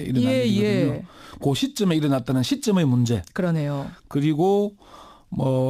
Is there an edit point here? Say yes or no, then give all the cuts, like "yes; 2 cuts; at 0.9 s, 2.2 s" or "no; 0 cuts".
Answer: yes; 1 cut; at 3.1 s